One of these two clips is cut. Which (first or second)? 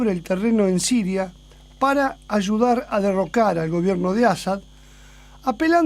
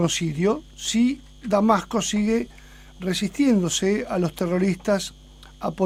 first